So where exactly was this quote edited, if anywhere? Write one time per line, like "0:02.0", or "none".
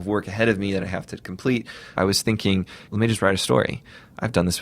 0:01.9
0:02.9